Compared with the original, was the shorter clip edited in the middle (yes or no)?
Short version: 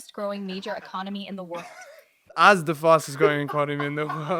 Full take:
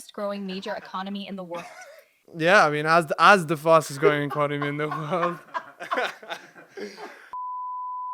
yes